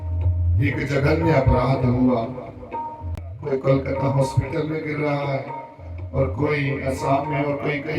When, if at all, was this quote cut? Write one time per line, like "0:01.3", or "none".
0:03.1

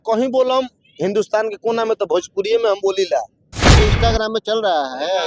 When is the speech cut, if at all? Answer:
0:03.6

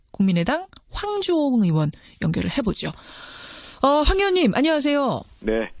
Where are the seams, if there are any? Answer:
0:02.4

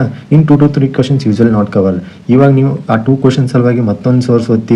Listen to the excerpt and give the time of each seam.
none

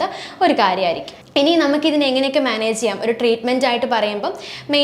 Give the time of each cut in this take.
0:01.1

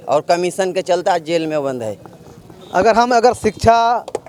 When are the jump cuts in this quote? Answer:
none

